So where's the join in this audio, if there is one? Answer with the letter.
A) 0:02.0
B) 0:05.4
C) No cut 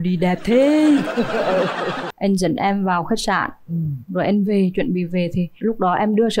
A